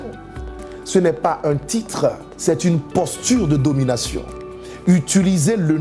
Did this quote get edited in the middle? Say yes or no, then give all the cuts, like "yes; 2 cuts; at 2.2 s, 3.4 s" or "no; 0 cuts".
yes; 1 cut; at 2.3 s